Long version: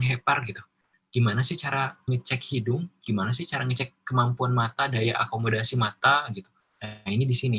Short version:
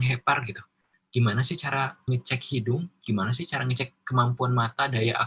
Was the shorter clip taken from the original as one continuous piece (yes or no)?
yes